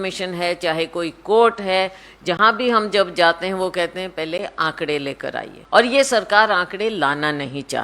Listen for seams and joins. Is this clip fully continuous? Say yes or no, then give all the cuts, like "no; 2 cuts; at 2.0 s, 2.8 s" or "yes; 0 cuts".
no; 1 cut; at 5.5 s